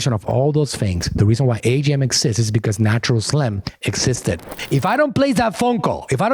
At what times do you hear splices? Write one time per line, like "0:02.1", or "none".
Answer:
0:04.5

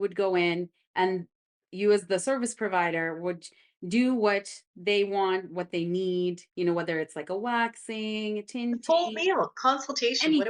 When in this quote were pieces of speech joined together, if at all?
0:01.7

